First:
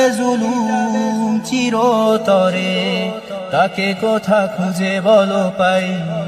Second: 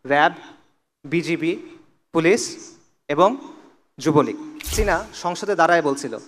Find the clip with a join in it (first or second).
second